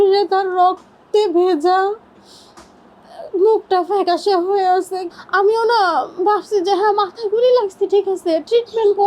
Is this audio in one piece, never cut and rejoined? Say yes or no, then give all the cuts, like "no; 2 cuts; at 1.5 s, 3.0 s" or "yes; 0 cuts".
no; 1 cut; at 5.0 s